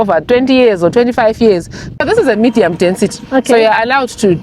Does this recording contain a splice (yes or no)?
yes